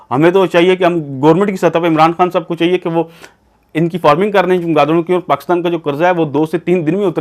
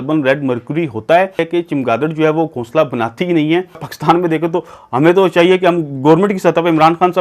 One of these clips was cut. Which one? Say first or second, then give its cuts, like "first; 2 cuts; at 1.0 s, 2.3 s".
second; 2 cuts; at 1.4 s, 3.9 s